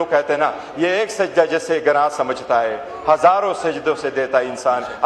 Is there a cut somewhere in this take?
no; 0 cuts

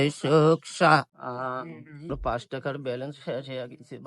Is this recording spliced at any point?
yes; 1 cut; at 2.2 s

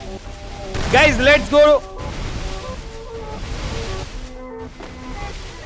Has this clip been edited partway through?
no; 0 cuts

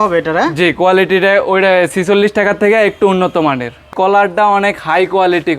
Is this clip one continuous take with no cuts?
no; 1 cut; at 3.9 s

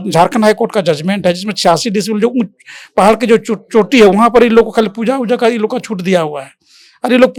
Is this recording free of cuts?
yes; 0 cuts

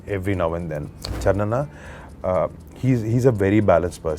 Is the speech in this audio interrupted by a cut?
yes; 1 cut; at 1.1 s

